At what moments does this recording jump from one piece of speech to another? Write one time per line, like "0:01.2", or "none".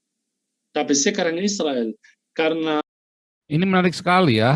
0:02.8